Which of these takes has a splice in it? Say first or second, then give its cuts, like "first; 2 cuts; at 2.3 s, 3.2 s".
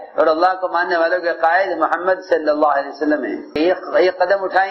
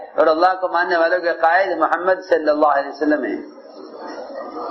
first; 1 cut; at 3.5 s